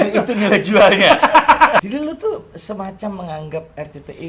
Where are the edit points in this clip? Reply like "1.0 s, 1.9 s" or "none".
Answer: 1.8 s